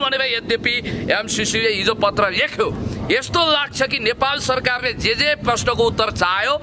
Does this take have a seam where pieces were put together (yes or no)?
no